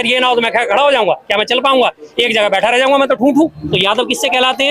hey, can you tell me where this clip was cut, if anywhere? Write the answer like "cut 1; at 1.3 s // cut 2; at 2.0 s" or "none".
cut 1; at 3.6 s